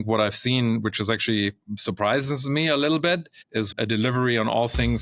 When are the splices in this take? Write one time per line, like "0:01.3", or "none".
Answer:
0:03.7

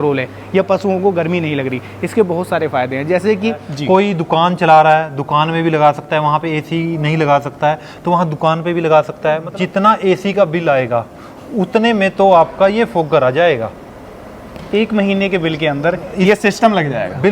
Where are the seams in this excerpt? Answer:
0:03.7
0:09.5

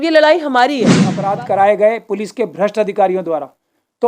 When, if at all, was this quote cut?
0:01.1

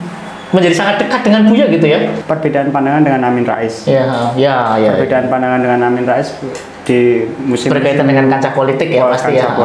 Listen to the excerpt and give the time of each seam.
0:02.2

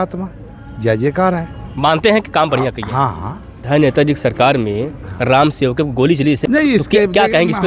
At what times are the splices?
0:03.6
0:06.4

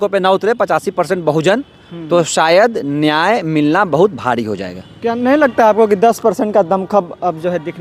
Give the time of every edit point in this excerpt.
none

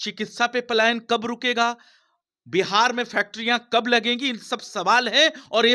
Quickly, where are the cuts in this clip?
none

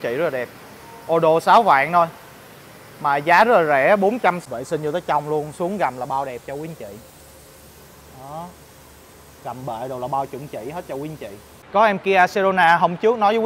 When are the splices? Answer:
0:04.4
0:11.5

